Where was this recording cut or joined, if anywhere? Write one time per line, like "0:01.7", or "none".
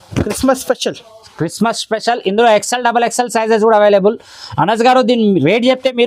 none